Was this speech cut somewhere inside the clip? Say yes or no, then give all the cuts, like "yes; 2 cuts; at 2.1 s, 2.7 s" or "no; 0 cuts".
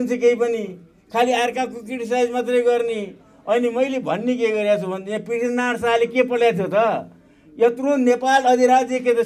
no; 0 cuts